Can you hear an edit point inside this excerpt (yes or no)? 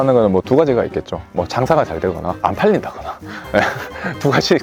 no